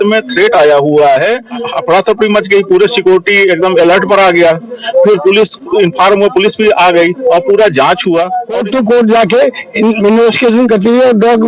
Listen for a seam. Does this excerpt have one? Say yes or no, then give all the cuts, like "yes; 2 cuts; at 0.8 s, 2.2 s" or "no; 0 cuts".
yes; 2 cuts; at 1.6 s, 8.5 s